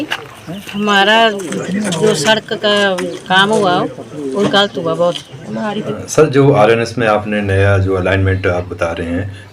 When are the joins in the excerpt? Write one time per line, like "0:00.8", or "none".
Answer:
0:05.9